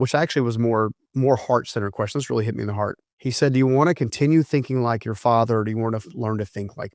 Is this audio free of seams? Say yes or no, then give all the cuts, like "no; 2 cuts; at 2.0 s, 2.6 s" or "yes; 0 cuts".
no; 2 cuts; at 1.0 s, 3.1 s